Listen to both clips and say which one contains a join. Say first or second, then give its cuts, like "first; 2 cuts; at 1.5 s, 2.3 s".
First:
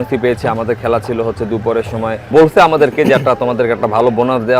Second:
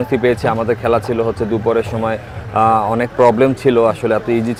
first; 1 cut; at 2.3 s